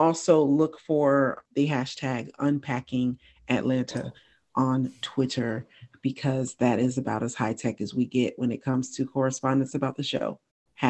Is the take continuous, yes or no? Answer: yes